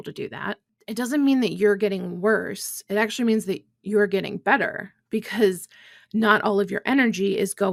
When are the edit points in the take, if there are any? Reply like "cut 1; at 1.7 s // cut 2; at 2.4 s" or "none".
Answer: none